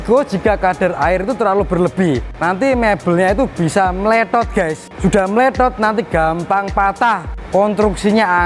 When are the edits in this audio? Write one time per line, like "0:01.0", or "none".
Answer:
0:02.3
0:04.8
0:07.3

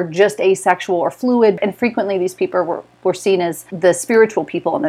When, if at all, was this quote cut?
0:01.6
0:03.7

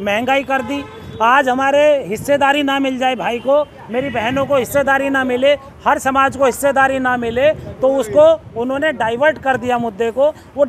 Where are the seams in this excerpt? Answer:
none

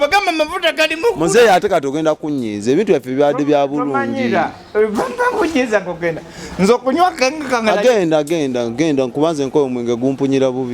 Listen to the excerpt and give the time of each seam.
none

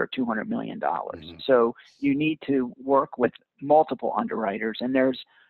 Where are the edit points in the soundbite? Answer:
none

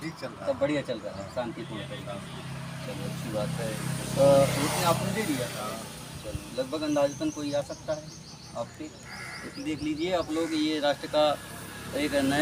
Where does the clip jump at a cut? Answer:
none

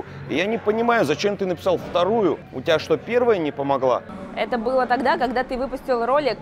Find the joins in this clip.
0:02.5
0:04.2

